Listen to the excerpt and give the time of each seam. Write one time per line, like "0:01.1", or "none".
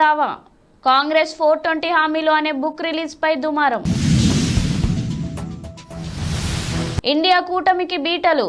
none